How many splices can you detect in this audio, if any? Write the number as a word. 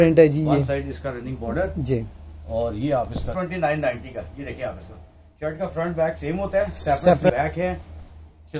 two